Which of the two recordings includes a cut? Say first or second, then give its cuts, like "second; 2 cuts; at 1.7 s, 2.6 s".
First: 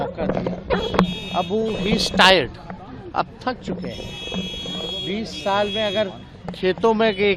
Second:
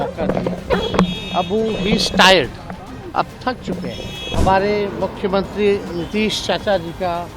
second; 1 cut; at 4.3 s